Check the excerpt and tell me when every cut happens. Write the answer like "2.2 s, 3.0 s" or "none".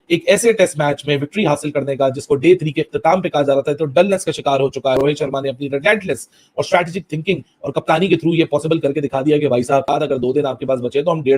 5.0 s, 9.9 s